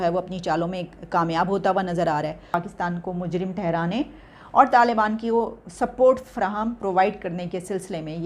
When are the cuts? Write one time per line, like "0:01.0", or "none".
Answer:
0:02.4